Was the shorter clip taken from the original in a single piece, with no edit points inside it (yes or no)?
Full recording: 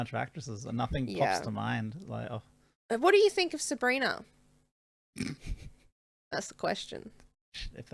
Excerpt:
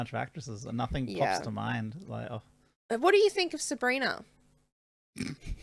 yes